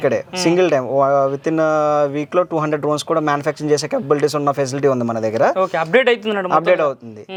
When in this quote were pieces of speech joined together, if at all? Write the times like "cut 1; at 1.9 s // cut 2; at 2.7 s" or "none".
none